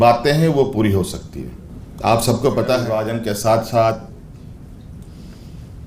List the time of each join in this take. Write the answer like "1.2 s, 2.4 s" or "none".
3.1 s